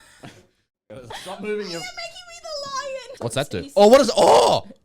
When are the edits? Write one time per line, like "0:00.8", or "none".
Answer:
0:03.1